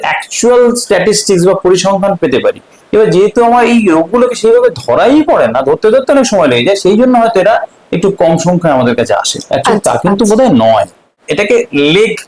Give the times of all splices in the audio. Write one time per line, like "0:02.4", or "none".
0:11.1